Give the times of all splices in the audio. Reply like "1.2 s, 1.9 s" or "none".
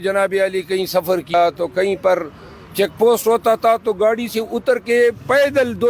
1.3 s